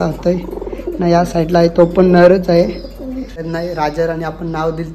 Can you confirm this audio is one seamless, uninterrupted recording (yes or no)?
no